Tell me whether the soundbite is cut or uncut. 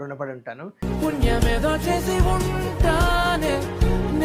uncut